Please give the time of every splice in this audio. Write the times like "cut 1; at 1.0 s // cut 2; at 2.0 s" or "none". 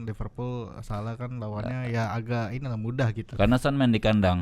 cut 1; at 3.2 s